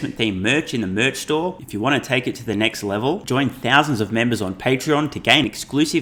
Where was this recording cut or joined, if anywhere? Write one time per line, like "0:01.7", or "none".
none